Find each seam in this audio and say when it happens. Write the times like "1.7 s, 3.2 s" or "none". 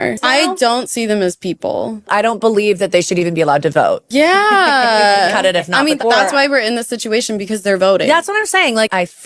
none